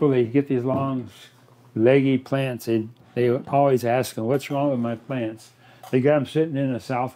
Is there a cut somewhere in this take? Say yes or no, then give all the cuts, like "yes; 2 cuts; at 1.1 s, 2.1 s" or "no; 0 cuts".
no; 0 cuts